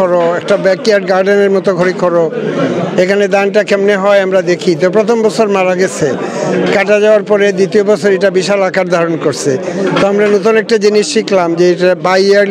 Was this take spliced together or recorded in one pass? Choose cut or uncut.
uncut